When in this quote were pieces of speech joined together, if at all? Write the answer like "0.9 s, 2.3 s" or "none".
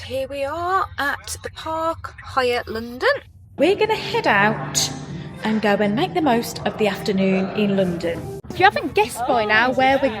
3.5 s, 8.3 s